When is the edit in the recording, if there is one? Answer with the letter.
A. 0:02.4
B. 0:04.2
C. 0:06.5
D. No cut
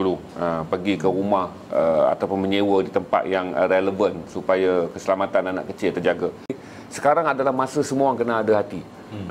C